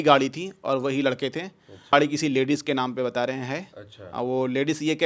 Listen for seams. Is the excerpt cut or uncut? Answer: cut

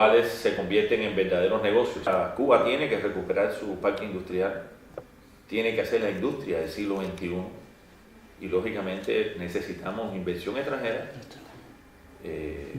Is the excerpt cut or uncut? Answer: cut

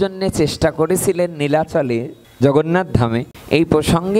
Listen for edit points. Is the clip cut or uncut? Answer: cut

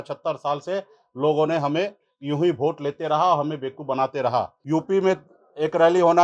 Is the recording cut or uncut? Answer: cut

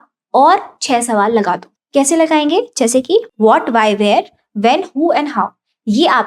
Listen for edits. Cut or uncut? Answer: cut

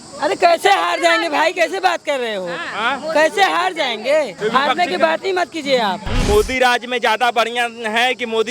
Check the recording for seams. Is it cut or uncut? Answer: cut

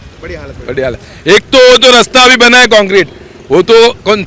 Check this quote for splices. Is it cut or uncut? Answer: uncut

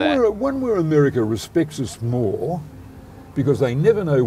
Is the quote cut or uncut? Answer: uncut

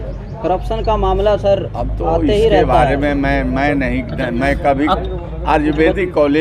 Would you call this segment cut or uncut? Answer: uncut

